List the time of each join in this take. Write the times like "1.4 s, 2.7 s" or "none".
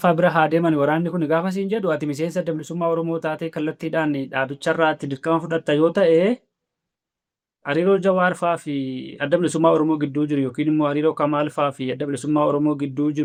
none